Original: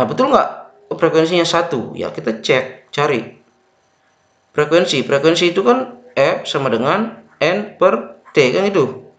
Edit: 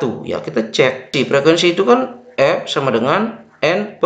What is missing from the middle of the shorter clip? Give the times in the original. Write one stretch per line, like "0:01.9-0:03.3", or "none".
0:02.8-0:04.9